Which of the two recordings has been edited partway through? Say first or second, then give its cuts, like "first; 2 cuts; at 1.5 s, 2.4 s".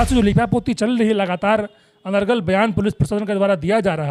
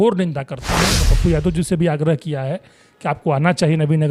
second; 1 cut; at 1.0 s